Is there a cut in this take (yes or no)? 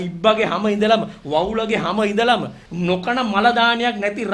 yes